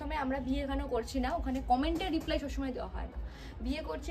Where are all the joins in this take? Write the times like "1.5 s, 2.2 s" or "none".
none